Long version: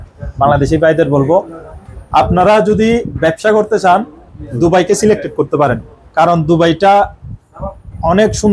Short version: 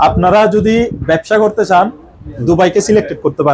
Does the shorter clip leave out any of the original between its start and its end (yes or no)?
no